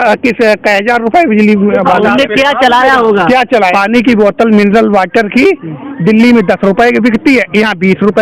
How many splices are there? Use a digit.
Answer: 1